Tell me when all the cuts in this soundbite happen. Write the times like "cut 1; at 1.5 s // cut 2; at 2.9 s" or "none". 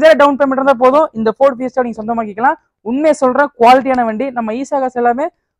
none